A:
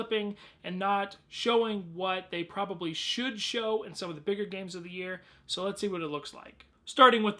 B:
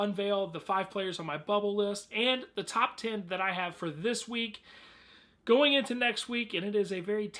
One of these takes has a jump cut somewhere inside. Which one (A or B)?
B